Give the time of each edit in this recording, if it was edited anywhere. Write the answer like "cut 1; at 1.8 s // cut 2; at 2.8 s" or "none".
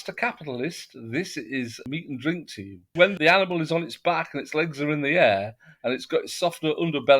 cut 1; at 3.0 s

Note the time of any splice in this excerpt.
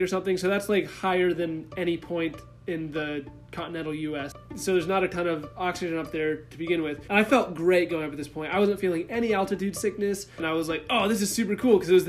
cut 1; at 4.2 s // cut 2; at 7.0 s // cut 3; at 10.4 s

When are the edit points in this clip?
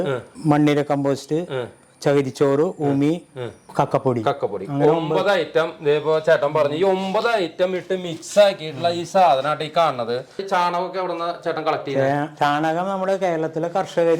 cut 1; at 10.4 s

